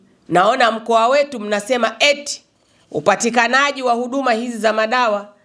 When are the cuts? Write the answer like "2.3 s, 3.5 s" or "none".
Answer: none